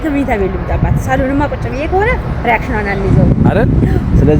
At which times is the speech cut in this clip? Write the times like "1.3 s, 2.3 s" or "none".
none